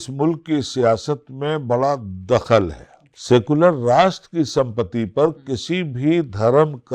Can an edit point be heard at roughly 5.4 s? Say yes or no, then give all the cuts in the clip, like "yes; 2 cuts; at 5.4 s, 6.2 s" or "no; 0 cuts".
no; 1 cut; at 3.0 s